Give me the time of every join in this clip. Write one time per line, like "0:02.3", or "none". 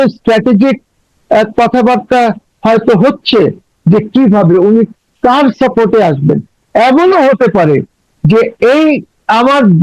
none